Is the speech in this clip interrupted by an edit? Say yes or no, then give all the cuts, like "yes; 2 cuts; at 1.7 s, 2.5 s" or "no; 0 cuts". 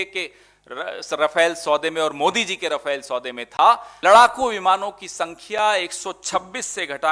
yes; 1 cut; at 3.9 s